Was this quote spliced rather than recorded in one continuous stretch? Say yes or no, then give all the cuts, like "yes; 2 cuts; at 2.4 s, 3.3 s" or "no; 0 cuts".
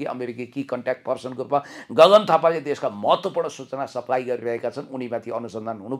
no; 0 cuts